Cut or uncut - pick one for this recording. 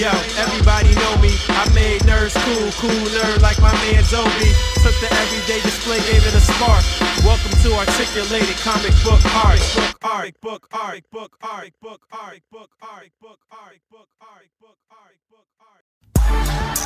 cut